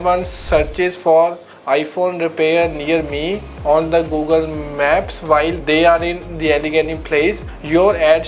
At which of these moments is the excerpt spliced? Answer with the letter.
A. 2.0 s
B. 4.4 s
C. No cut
C